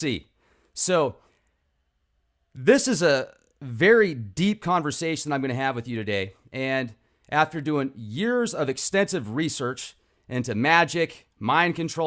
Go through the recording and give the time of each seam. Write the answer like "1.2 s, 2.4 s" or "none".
9.3 s